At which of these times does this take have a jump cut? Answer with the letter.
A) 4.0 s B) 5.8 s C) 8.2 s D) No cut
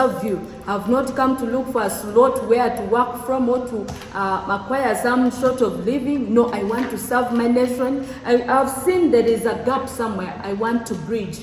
D